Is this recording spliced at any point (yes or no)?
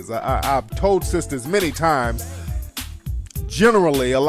yes